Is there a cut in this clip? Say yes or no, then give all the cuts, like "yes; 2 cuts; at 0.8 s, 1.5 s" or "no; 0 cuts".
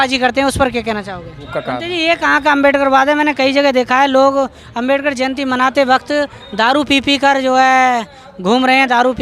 yes; 1 cut; at 1.5 s